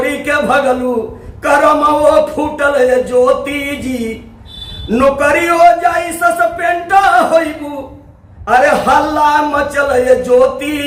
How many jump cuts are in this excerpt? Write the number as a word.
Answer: zero